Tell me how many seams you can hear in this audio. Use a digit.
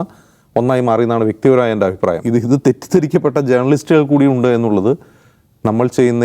1